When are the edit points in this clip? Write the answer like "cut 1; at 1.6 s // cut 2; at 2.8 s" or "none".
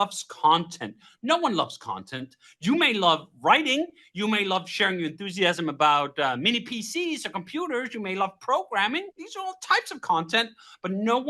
cut 1; at 9.2 s